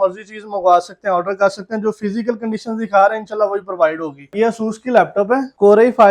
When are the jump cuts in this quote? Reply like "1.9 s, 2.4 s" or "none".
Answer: 4.3 s